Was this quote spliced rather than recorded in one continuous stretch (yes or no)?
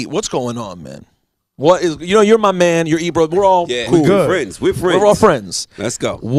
no